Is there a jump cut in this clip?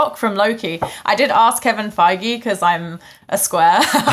no; 0 cuts

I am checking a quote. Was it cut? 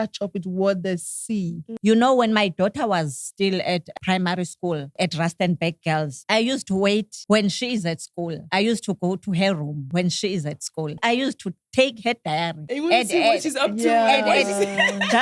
yes; 9 cuts; at 1.7 s, 3.9 s, 4.9 s, 6.2 s, 7.1 s, 8.4 s, 9.8 s, 11.0 s, 12.6 s

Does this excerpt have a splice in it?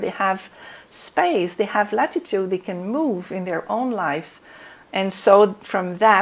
no; 0 cuts

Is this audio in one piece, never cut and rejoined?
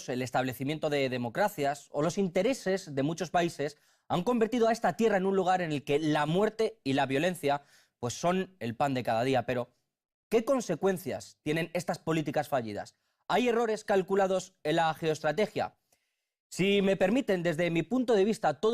no; 1 cut; at 14.3 s

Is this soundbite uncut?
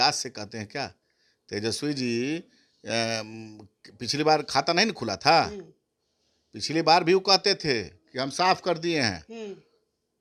yes; 0 cuts

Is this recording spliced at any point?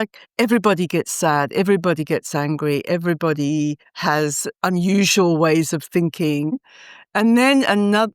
yes; 1 cut; at 6.6 s

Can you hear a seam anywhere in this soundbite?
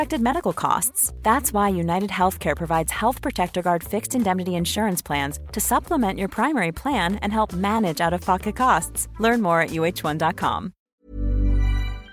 yes; 1 cut; at 10.9 s

